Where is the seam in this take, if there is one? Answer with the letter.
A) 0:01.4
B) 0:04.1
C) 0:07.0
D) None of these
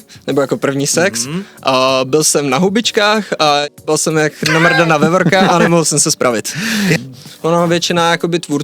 C